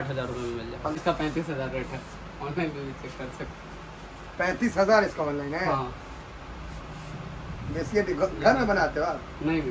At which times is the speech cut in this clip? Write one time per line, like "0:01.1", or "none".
0:01.0